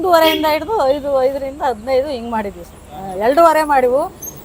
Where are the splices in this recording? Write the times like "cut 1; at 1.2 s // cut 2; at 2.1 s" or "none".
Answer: none